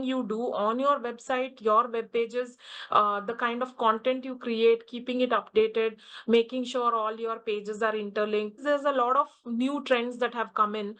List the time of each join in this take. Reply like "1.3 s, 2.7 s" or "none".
8.6 s